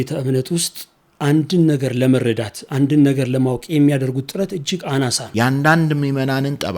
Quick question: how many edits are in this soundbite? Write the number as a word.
one